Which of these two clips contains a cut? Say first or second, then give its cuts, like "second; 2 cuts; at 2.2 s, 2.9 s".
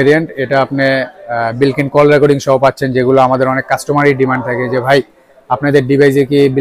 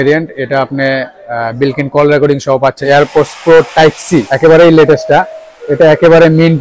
second; 2 cuts; at 2.8 s, 4.3 s